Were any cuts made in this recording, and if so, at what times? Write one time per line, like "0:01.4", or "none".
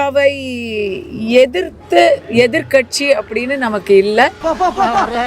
0:04.4